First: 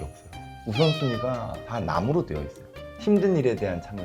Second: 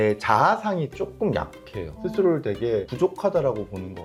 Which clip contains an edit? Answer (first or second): first